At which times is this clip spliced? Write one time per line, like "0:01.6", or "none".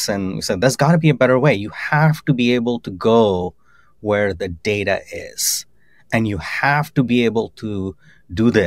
none